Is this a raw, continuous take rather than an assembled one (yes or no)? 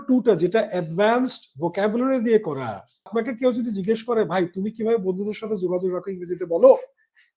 no